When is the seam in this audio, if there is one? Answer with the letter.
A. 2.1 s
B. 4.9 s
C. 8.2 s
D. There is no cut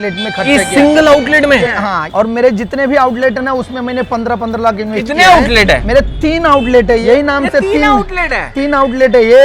A